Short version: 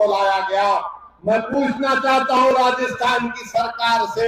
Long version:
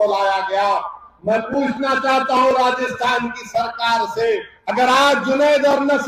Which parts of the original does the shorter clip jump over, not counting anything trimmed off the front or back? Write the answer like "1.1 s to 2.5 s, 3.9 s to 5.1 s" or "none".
none